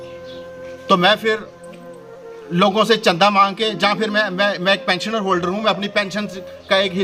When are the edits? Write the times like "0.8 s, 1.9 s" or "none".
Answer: none

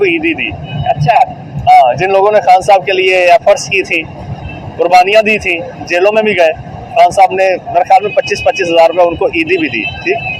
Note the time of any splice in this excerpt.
none

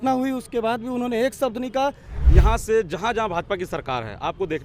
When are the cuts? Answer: 2.1 s

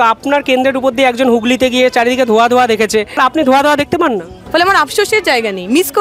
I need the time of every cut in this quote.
3.1 s, 4.4 s

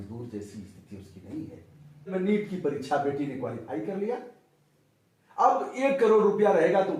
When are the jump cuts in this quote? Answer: 2.1 s

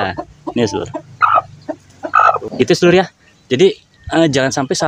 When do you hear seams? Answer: 2.4 s

